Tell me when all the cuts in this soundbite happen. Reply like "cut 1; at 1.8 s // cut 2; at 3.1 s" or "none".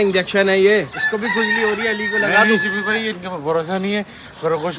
none